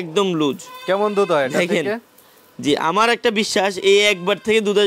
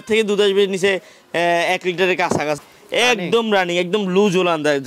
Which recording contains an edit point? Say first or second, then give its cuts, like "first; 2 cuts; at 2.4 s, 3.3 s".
second; 1 cut; at 2.6 s